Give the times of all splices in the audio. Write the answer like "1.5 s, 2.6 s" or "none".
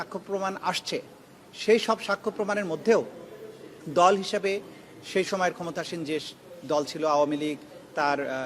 none